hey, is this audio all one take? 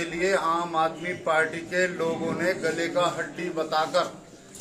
yes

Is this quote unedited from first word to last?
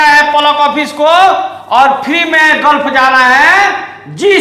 yes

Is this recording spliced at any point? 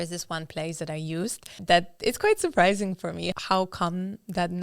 yes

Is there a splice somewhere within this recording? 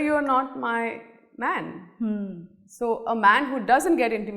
no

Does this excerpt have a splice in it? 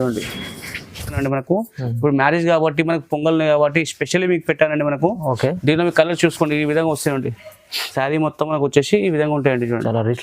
yes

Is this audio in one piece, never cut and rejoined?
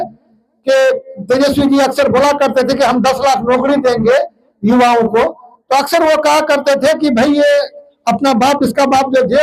yes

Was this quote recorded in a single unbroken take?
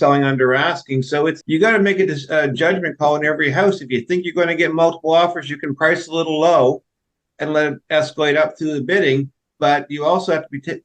no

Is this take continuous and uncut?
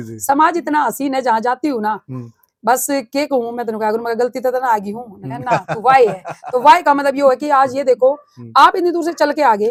yes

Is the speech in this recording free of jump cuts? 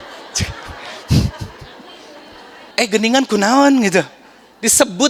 no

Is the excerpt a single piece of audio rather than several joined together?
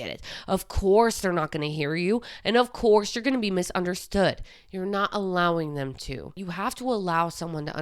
no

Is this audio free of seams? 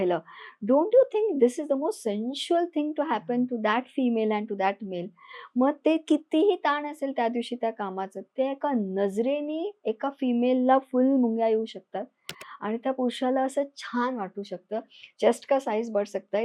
yes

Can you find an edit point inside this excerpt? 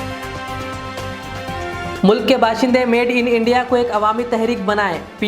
yes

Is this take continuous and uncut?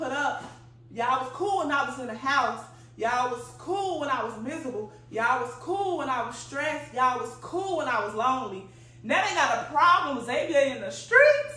yes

